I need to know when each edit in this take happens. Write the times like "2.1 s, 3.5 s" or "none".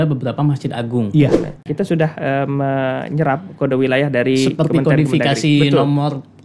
1.6 s